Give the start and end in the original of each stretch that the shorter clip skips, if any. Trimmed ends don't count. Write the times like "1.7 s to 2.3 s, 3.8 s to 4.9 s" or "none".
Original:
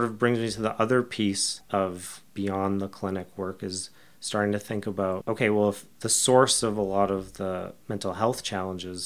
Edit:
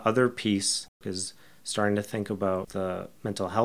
1.7 s to 3.5 s, 5.2 s to 7.3 s